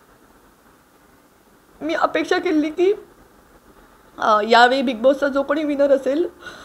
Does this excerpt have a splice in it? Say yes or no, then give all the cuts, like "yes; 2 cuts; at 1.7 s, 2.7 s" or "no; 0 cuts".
no; 0 cuts